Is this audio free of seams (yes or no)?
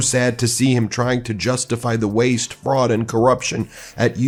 yes